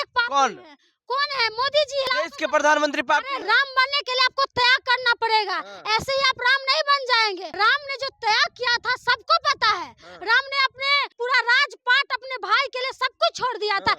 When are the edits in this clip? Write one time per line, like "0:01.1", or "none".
0:02.1
0:03.3
0:07.5
0:11.1

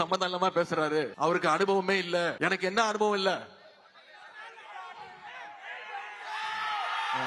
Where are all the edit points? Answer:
0:01.1
0:02.3

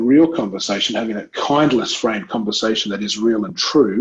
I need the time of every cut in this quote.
none

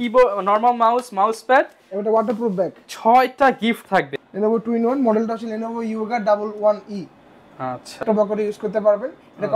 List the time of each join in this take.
0:04.2
0:08.0

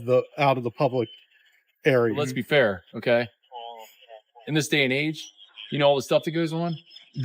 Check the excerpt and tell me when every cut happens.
0:02.3

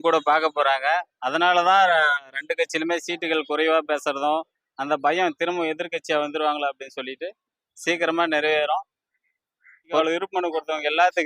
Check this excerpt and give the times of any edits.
0:10.0

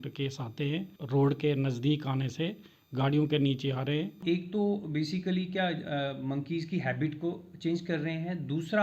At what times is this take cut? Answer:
0:01.0
0:04.2

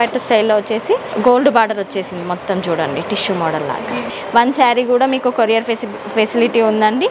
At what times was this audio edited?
0:01.1
0:04.2

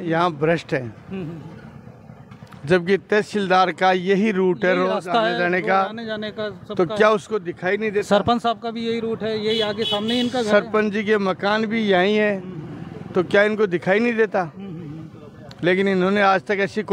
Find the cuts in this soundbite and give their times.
none

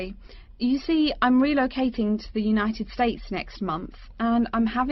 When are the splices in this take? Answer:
none

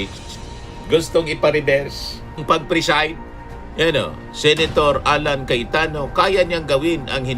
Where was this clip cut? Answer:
0:02.4

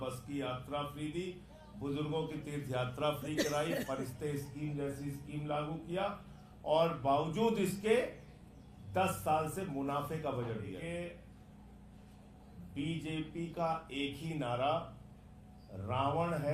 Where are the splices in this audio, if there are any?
0:10.8

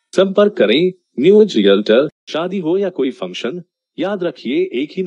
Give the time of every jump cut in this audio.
0:02.2

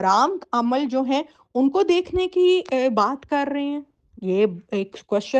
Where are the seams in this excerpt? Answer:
none

